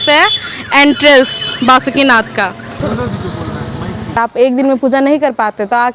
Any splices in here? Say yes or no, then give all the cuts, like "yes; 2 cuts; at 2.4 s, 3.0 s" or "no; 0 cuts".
yes; 1 cut; at 4.2 s